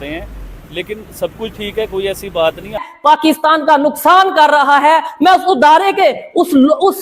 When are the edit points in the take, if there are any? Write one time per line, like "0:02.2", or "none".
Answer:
0:02.8